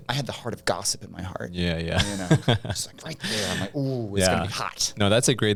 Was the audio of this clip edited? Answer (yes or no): no